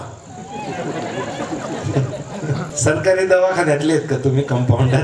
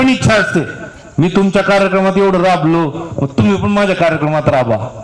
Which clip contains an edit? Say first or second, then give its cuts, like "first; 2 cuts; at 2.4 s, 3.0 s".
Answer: first; 1 cut; at 2.7 s